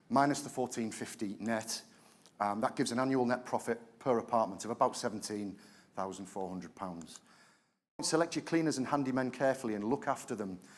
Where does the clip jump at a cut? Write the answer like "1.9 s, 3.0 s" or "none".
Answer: 8.0 s